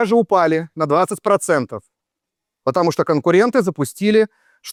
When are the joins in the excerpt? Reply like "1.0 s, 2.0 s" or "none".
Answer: none

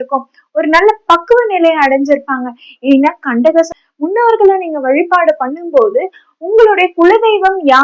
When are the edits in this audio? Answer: 3.8 s

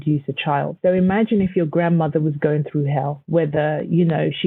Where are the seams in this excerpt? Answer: 0.8 s, 3.2 s

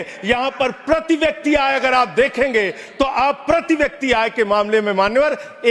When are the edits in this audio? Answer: none

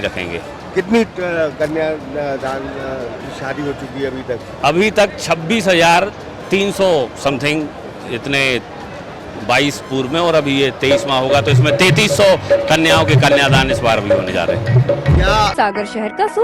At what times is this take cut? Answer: 15.5 s

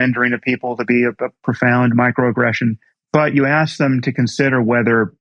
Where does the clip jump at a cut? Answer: 2.9 s

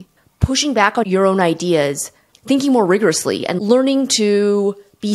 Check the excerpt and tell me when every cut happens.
3.4 s

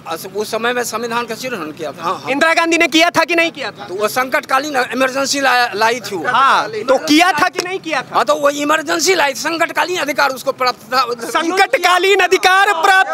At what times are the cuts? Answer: none

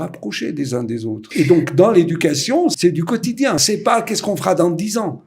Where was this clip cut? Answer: 1.3 s, 2.8 s

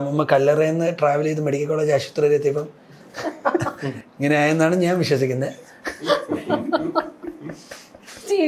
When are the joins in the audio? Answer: none

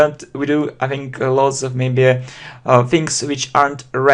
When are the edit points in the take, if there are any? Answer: 2.9 s

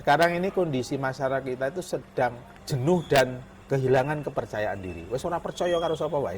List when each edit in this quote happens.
2.5 s, 3.5 s

